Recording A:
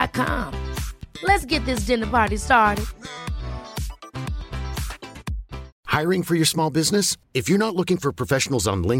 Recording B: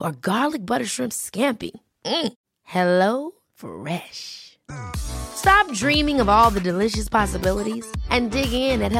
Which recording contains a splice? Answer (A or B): A